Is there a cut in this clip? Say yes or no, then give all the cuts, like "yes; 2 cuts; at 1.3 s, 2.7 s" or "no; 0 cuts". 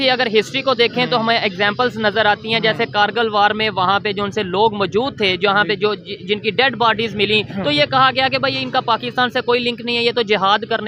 no; 0 cuts